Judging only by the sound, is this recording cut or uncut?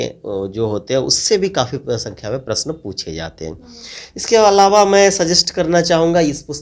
uncut